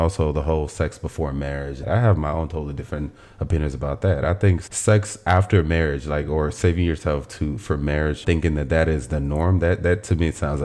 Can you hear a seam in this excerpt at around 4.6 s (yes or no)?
yes